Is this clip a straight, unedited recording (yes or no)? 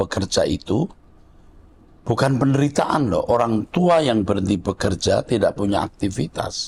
yes